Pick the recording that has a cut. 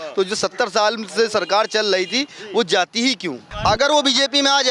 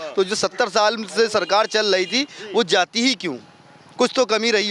first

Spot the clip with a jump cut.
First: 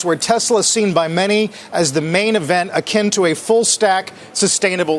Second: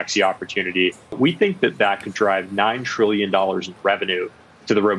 second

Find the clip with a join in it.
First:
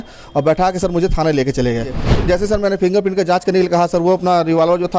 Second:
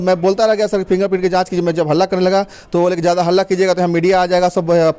first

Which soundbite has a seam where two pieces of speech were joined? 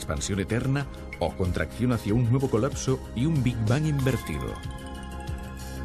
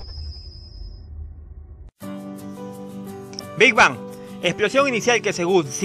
second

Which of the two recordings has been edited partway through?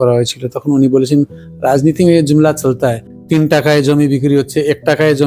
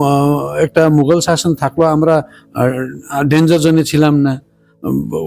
first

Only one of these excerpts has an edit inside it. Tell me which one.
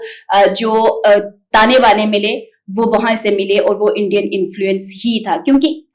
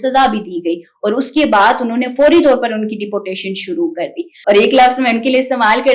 second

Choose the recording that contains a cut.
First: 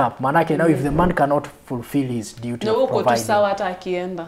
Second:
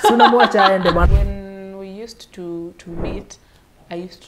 second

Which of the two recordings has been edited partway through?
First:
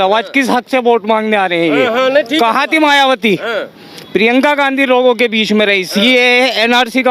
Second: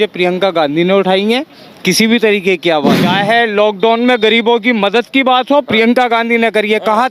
second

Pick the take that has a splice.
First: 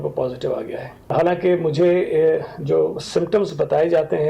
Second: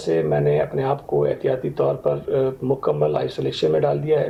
first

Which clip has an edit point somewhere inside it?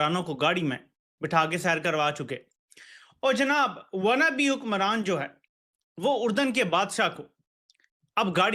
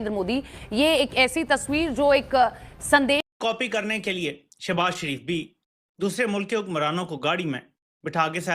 second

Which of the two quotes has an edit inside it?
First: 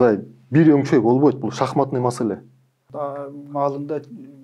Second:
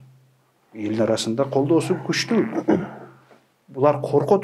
first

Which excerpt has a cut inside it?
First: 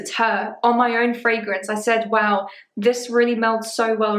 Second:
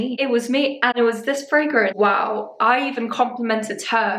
second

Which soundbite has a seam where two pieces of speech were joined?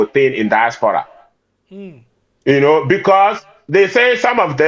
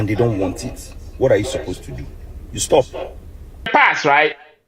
second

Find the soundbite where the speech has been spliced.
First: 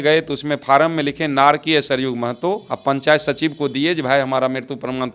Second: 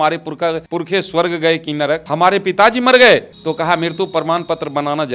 second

